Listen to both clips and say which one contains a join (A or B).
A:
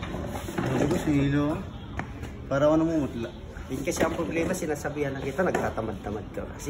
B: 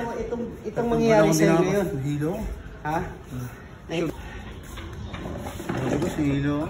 B